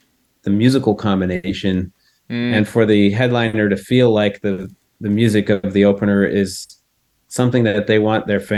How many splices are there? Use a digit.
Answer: 0